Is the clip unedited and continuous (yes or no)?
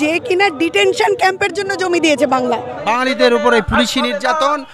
no